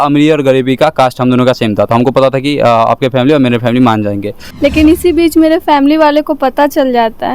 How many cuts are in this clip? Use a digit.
1